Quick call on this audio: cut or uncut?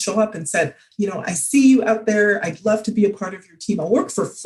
uncut